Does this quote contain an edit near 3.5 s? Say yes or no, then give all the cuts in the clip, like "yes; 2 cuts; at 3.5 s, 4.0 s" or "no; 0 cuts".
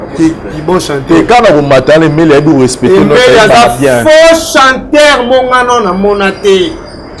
no; 0 cuts